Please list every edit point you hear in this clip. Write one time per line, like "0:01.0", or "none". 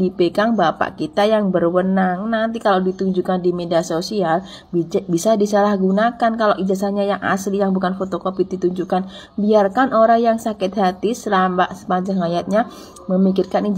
none